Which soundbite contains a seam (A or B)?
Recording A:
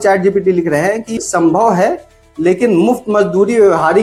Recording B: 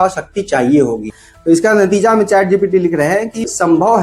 B